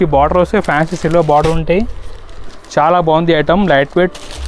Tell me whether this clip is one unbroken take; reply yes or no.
yes